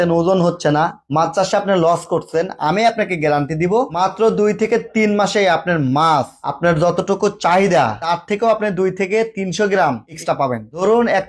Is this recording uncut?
yes; 0 cuts

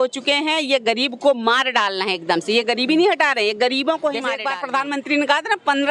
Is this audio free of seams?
no; 1 cut; at 4.4 s

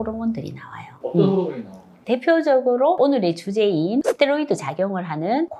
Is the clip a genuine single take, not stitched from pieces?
yes; 0 cuts

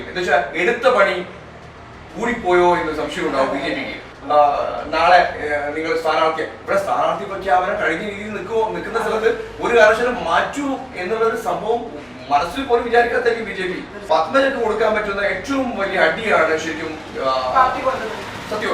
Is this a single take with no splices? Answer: no; 2 cuts; at 4.1 s, 14.0 s

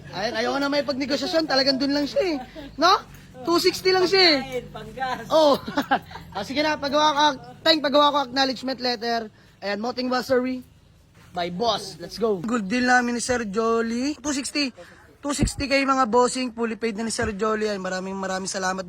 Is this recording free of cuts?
yes; 0 cuts

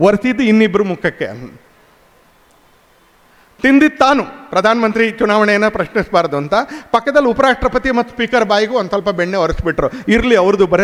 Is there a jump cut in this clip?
no; 0 cuts

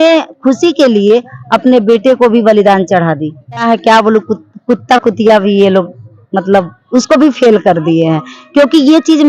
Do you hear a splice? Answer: yes; 1 cut; at 3.6 s

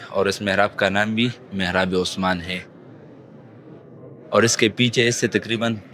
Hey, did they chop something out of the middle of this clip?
no; 0 cuts

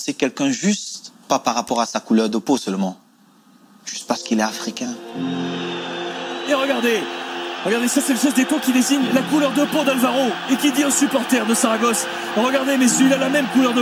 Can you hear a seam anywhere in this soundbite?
no; 0 cuts

